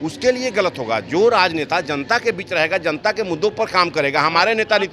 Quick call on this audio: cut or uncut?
uncut